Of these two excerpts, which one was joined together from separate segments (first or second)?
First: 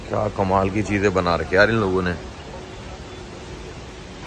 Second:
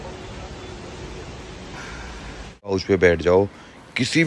second